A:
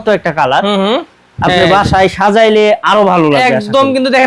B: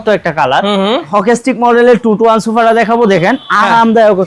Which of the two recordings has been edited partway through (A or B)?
B